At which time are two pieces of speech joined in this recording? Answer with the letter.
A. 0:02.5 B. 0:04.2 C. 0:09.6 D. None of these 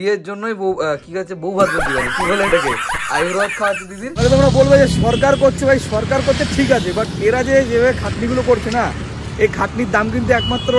B